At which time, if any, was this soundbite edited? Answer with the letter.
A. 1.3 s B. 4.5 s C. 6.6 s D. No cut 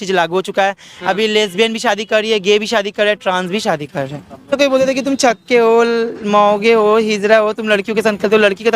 B